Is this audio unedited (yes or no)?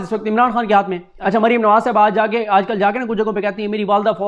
no